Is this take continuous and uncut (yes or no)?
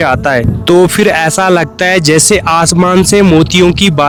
yes